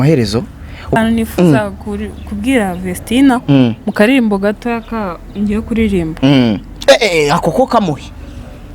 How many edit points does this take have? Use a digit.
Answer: 1